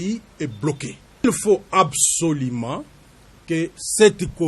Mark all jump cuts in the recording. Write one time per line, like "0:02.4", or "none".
0:01.2